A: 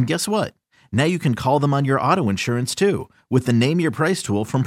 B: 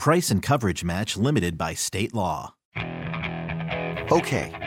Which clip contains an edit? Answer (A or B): B